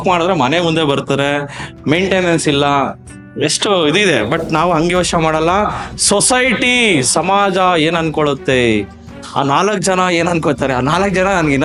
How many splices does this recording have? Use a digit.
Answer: 0